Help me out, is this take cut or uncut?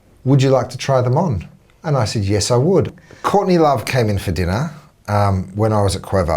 cut